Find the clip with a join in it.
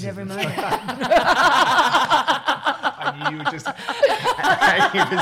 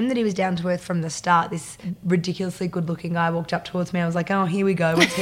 second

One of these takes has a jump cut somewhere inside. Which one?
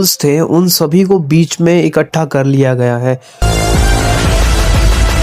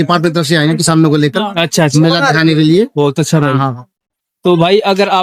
first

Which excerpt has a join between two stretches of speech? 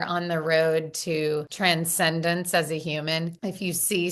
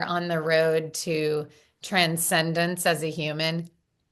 first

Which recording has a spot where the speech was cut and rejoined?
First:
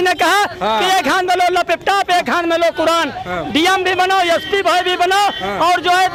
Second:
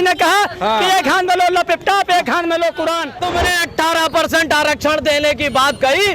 second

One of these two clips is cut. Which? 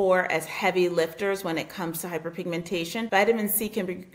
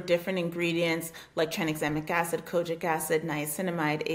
first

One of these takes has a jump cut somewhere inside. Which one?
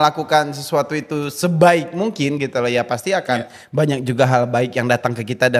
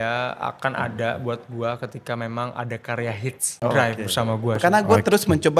second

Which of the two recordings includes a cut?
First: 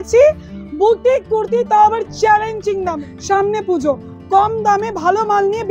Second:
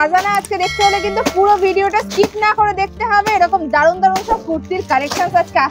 first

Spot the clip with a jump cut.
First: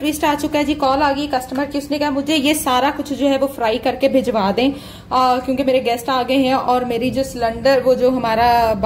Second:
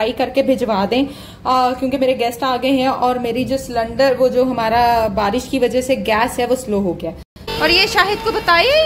second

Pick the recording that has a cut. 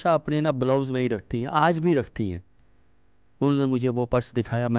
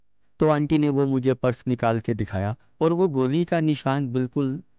second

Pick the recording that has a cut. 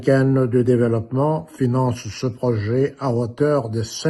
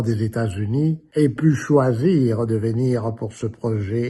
second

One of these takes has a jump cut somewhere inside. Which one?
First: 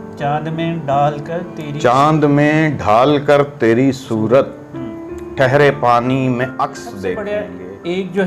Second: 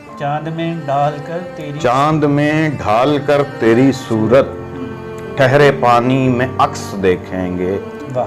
first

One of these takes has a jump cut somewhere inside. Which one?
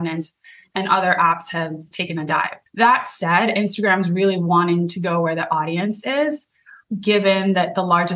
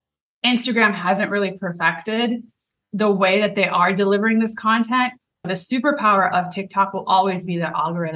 first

